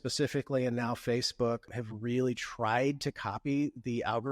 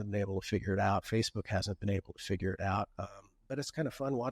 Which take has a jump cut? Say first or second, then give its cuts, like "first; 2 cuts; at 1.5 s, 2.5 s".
first; 1 cut; at 1.7 s